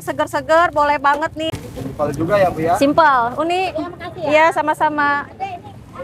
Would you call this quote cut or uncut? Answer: cut